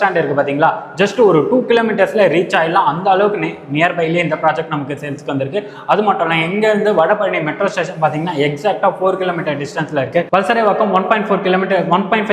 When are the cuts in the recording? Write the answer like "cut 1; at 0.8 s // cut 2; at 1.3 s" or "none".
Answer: none